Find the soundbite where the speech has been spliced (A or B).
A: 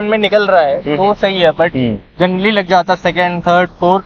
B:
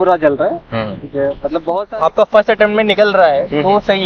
B